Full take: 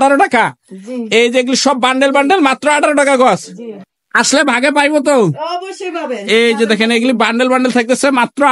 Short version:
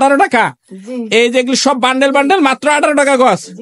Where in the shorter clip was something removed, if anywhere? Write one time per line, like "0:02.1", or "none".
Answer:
none